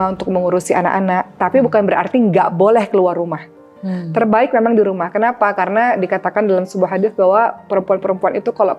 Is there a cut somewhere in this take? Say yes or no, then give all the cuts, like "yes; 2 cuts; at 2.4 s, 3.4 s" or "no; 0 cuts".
no; 0 cuts